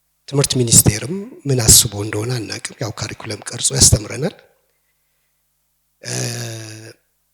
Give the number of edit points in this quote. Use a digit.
0